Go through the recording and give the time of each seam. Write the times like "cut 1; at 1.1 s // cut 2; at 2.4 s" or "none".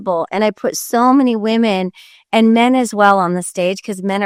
none